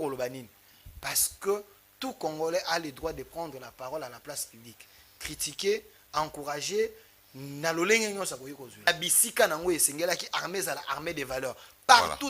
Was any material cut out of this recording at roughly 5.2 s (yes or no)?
no